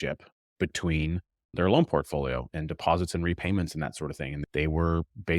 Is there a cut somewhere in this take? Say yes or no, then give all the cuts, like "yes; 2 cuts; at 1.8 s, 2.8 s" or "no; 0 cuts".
yes; 3 cuts; at 1.5 s, 2.5 s, 4.4 s